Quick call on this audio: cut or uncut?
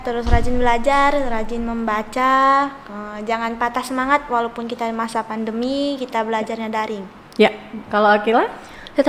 uncut